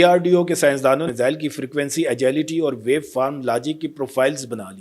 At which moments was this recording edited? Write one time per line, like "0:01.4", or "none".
0:01.0